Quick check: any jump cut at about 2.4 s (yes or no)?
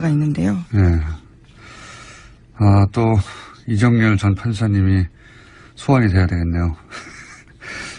no